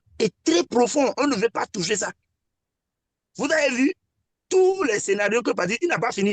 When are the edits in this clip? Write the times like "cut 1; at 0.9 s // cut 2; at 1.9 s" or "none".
none